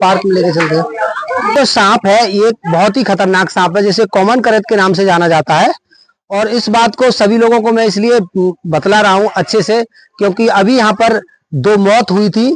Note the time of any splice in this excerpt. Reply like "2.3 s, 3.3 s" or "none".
1.5 s

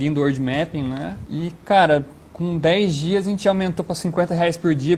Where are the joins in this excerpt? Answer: none

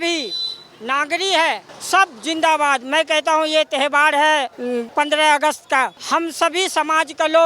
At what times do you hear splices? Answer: 1.7 s, 4.8 s, 6.0 s

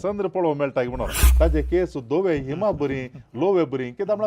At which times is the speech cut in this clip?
1.2 s

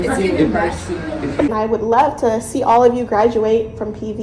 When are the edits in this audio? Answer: 1.1 s

